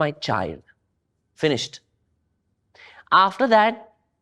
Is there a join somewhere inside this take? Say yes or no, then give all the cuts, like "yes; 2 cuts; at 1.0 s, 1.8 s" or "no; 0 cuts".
no; 0 cuts